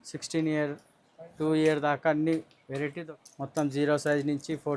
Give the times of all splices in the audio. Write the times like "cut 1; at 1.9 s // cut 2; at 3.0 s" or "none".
cut 1; at 3.0 s